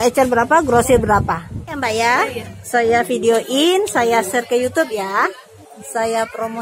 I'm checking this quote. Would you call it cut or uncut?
cut